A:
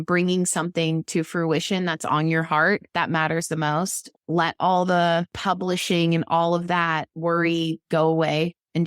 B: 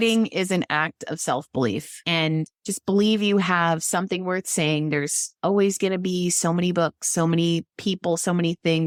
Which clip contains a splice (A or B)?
A